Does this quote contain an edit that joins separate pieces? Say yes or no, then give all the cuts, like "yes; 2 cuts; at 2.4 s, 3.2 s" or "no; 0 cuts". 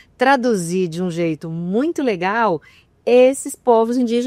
no; 0 cuts